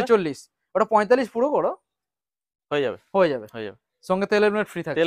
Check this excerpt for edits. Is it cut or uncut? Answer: uncut